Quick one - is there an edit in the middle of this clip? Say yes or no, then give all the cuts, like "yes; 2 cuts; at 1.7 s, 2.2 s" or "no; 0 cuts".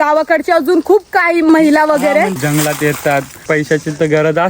yes; 3 cuts; at 1.5 s, 2.4 s, 3.5 s